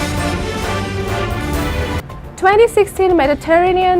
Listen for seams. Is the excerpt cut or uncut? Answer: cut